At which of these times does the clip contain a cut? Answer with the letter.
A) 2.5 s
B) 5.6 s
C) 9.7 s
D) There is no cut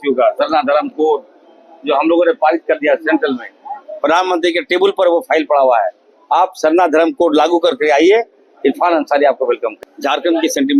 C